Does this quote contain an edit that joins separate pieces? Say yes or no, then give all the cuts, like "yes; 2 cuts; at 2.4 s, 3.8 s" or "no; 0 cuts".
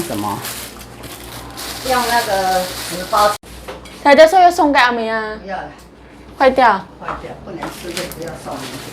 yes; 1 cut; at 3.5 s